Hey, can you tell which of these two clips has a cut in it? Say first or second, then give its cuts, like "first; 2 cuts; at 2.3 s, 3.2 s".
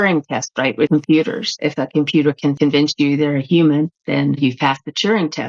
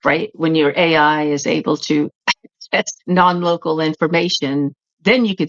first; 3 cuts; at 0.9 s, 1.5 s, 2.6 s